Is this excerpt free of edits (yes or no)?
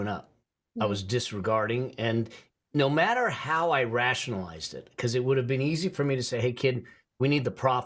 yes